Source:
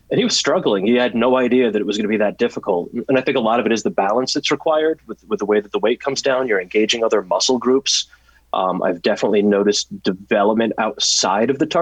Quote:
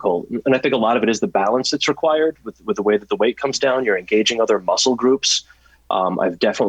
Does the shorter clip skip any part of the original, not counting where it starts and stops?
no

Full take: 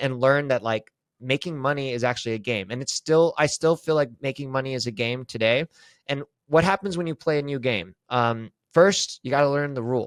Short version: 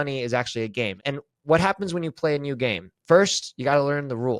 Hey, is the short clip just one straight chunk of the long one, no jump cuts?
no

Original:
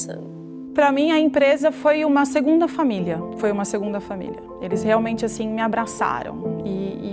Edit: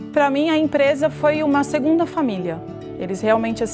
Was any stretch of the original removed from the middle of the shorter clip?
yes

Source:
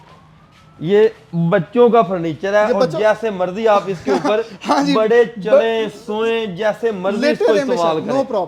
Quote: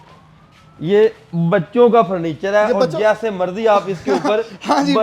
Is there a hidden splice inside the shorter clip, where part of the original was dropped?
no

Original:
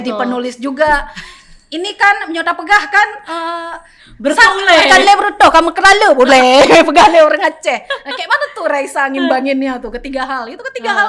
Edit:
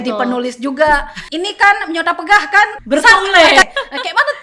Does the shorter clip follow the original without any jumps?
no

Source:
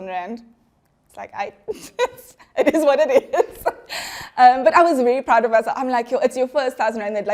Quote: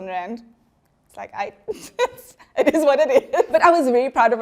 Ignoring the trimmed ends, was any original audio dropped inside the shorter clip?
yes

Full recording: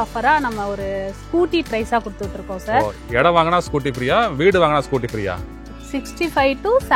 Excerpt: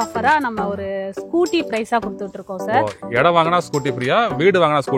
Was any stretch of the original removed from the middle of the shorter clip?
no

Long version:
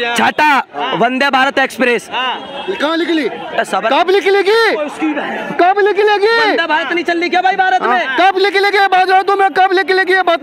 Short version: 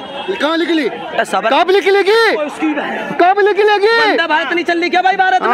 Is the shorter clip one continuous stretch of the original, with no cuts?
yes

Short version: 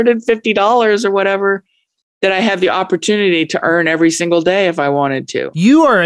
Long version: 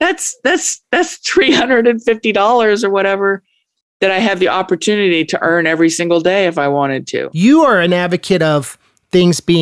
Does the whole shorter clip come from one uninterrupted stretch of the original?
yes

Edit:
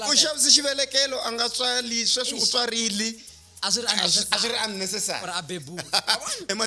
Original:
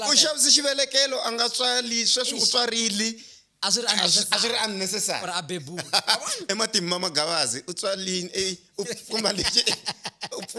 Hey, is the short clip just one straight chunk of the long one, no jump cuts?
yes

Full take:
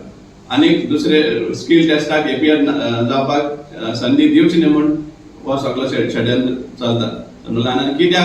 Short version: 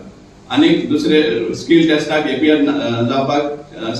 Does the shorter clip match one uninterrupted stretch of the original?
yes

